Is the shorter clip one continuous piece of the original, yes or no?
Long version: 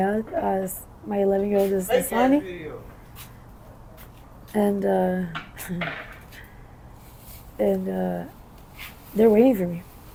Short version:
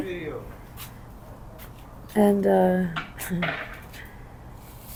yes